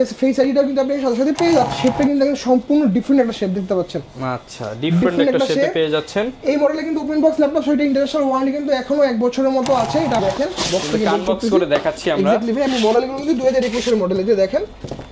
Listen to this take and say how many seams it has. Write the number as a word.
two